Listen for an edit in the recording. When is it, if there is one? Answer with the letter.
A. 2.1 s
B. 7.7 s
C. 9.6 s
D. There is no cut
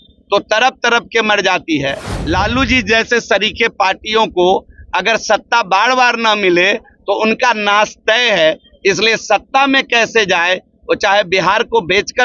A